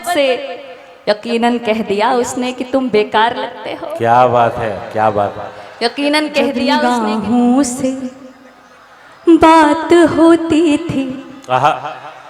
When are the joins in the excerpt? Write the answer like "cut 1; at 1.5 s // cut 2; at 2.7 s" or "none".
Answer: cut 1; at 6.7 s